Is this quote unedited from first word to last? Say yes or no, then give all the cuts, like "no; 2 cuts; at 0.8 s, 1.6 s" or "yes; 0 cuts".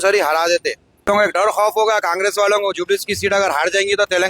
no; 1 cut; at 1.1 s